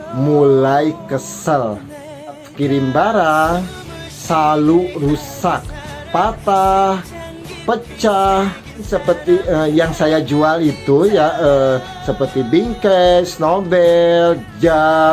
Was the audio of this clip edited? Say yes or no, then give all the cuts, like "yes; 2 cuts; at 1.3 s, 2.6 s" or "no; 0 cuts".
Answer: no; 0 cuts